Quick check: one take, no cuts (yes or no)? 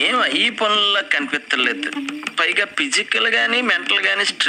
yes